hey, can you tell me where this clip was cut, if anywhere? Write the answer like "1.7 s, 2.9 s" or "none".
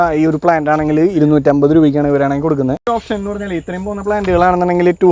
2.9 s